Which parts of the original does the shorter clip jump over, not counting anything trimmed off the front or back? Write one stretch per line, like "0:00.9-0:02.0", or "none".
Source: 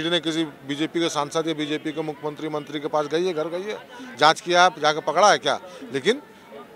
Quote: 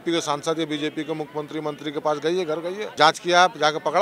0:03.7-0:04.1